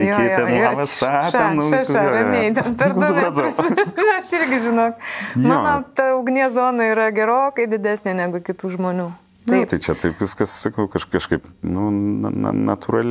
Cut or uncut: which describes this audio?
uncut